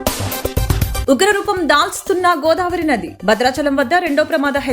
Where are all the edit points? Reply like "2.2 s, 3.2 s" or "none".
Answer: 1.0 s